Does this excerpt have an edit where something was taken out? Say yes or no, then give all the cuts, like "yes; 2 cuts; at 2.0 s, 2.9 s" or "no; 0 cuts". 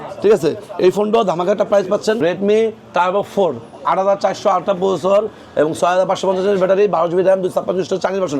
yes; 1 cut; at 2.2 s